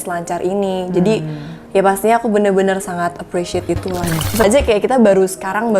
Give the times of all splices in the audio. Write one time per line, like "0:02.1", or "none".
0:04.4